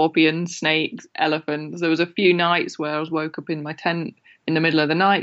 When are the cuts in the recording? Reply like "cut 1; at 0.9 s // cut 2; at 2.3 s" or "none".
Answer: none

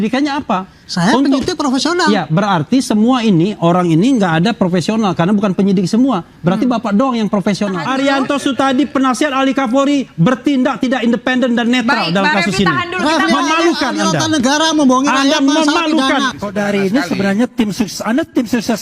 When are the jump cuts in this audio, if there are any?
cut 1; at 7.8 s // cut 2; at 16.5 s

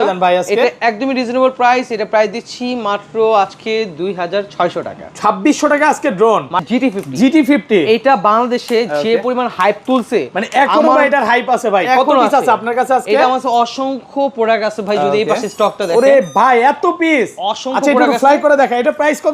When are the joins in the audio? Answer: cut 1; at 6.6 s

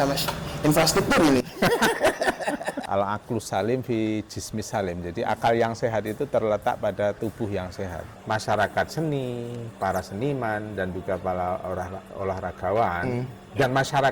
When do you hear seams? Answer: cut 1; at 2.8 s // cut 2; at 8.1 s

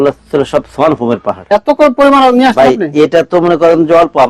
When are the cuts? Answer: cut 1; at 1.5 s

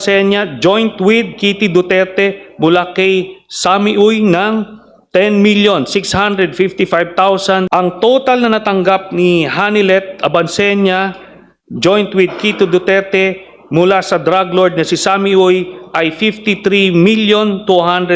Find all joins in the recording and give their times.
cut 1; at 7.7 s

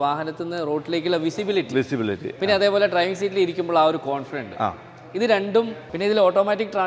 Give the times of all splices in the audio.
cut 1; at 5.9 s

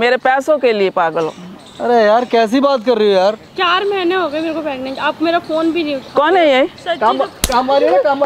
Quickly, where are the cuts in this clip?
cut 1; at 3.5 s // cut 2; at 6.8 s

